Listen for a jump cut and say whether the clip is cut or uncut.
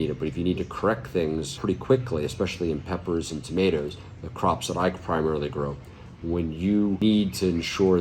cut